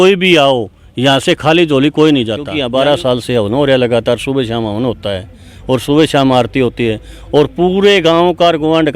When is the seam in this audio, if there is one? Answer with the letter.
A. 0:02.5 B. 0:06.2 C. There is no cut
A